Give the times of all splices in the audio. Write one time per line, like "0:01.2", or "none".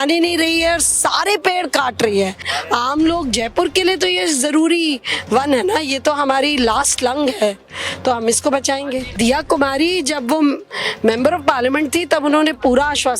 0:02.5
0:09.1